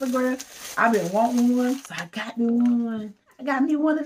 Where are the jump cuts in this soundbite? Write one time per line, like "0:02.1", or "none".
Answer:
0:01.9